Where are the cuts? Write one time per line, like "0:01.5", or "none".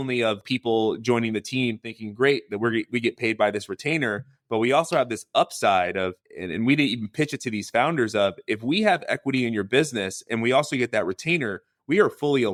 none